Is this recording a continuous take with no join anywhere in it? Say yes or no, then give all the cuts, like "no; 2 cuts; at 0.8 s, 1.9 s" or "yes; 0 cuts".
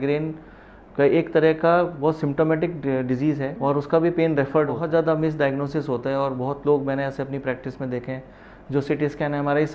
no; 1 cut; at 4.8 s